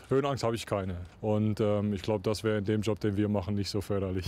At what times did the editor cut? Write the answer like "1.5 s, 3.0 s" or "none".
1.0 s

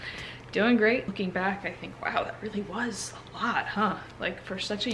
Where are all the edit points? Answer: 1.1 s

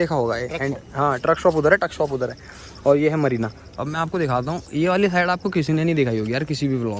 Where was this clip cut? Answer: none

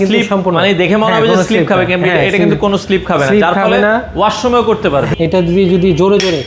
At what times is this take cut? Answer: 5.1 s

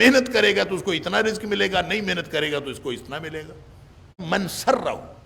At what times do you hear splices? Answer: 4.2 s

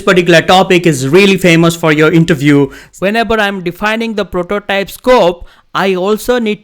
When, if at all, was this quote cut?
2.8 s

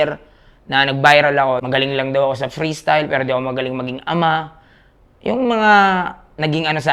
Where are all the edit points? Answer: 1.6 s

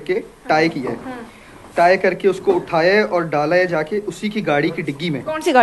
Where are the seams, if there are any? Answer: none

